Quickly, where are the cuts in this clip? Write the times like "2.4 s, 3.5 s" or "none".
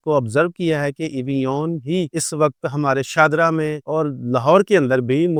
none